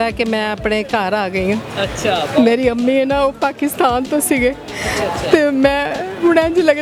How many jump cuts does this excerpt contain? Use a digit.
0